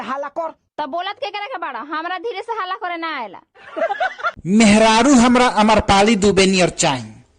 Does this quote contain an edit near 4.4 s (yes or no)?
yes